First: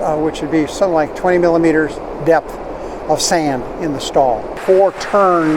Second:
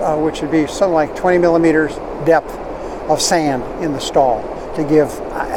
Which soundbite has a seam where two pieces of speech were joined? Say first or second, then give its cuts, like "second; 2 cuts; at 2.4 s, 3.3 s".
first; 1 cut; at 4.5 s